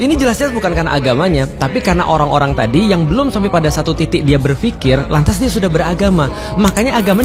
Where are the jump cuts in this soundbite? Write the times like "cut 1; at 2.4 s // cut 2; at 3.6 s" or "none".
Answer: none